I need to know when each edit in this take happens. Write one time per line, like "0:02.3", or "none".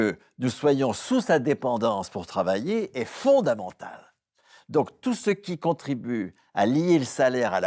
none